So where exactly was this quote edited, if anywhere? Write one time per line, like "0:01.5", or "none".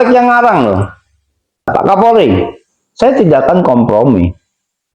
0:01.7